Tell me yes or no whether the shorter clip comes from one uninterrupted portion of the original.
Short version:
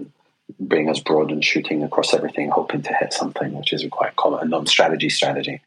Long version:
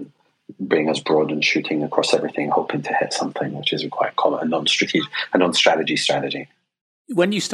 no